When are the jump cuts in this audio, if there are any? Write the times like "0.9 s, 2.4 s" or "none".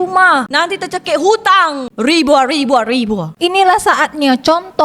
1.8 s, 3.3 s